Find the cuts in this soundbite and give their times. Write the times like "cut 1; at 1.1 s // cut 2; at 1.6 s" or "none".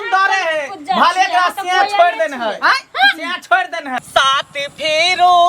cut 1; at 4.0 s